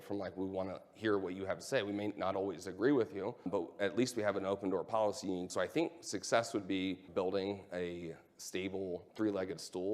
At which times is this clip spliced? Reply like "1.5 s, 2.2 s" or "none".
3.5 s, 5.5 s, 7.1 s, 9.1 s